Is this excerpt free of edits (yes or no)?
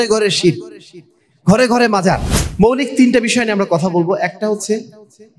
no